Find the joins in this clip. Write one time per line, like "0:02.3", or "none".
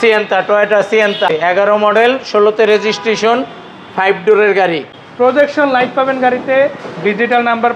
0:01.3
0:05.0